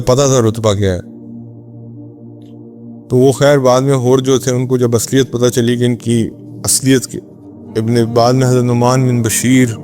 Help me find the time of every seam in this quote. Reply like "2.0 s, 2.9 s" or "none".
1.1 s, 3.0 s